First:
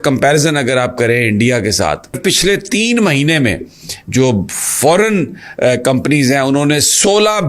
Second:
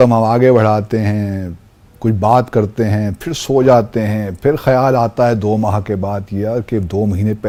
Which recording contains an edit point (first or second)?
first